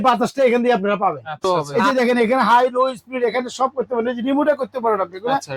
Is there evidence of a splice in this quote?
yes; 1 cut; at 1.4 s

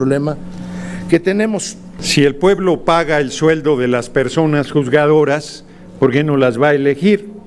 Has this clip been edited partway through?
yes; 1 cut; at 2.0 s

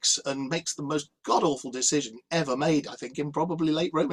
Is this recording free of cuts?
yes; 0 cuts

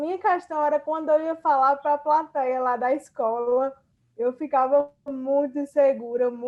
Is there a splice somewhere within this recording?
no; 0 cuts

